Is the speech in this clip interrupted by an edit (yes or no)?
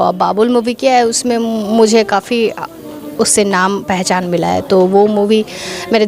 no